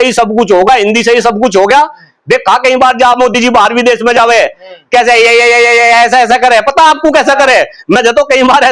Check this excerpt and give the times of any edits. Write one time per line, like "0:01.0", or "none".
none